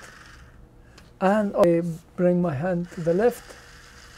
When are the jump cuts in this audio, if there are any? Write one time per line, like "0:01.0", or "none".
0:01.6